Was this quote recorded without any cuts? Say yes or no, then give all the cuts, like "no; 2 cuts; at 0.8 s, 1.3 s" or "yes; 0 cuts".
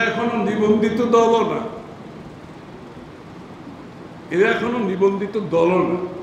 yes; 0 cuts